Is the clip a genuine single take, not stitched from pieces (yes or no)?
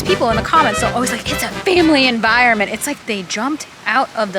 no